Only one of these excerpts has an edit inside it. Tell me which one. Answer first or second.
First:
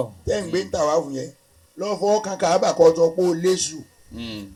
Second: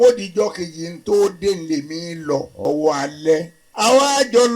second